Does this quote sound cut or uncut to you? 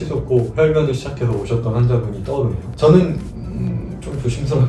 cut